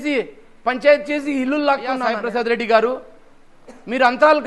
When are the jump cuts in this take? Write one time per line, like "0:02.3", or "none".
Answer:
0:02.1